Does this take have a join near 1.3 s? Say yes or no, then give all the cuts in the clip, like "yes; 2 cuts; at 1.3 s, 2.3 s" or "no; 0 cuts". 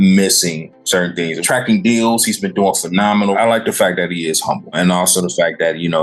yes; 3 cuts; at 1.3 s, 3.3 s, 4.8 s